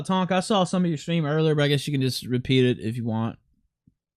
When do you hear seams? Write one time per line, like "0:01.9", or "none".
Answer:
none